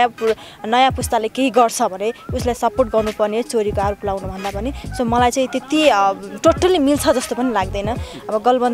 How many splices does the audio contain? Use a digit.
0